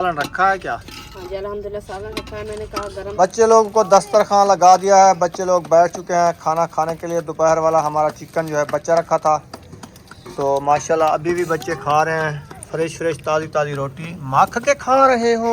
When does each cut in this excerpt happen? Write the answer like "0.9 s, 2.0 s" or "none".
3.1 s